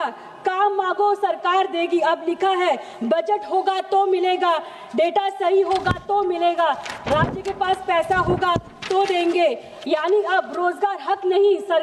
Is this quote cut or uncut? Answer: uncut